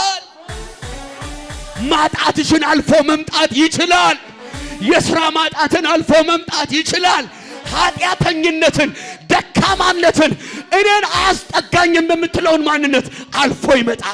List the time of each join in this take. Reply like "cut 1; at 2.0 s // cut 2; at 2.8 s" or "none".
none